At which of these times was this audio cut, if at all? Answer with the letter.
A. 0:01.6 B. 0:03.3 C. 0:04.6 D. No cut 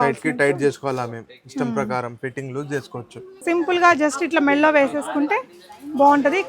B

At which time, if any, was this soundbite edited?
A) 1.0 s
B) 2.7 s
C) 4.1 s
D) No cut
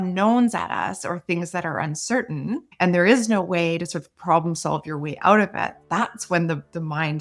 B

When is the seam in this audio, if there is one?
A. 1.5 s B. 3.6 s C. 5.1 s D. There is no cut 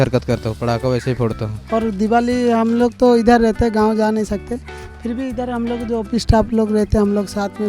D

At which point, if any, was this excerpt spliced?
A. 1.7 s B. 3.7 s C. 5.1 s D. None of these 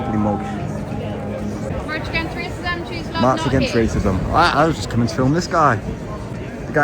A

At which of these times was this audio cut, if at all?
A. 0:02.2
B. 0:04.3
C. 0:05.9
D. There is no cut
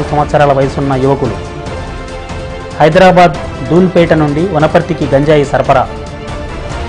C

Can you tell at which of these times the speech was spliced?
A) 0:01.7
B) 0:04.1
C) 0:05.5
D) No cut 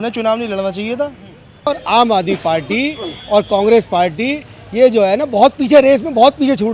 A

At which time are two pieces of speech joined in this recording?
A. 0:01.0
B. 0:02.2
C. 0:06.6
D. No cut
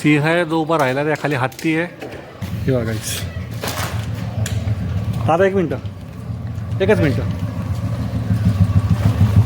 B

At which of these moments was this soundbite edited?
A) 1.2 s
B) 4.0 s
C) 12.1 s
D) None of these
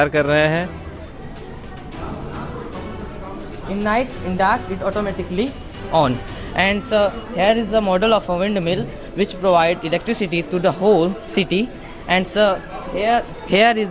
A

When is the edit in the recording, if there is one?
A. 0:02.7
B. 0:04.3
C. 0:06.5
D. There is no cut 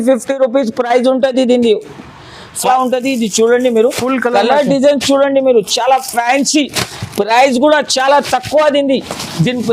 A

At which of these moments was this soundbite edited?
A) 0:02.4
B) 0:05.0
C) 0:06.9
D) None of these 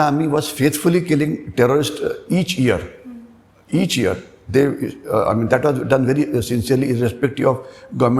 D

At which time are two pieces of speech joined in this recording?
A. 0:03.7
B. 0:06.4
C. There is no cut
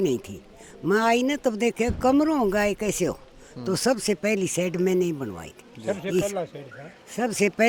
C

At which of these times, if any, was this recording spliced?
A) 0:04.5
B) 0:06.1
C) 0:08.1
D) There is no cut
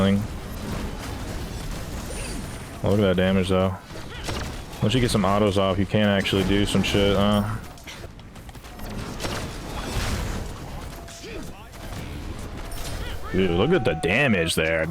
C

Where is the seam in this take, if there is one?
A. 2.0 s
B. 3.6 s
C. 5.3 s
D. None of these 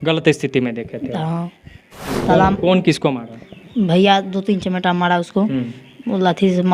A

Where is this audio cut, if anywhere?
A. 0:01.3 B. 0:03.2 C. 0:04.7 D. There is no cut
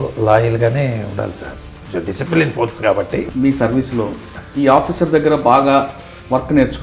B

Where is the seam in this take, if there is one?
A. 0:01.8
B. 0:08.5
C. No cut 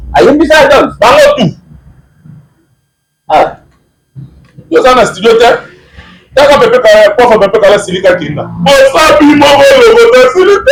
C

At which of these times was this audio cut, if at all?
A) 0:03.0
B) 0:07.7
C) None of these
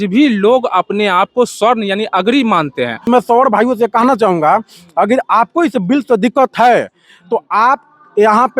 A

